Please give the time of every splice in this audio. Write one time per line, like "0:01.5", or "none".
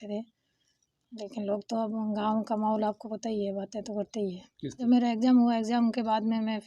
0:04.8